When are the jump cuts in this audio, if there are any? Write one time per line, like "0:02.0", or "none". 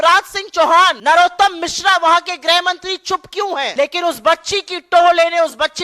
0:01.0
0:03.7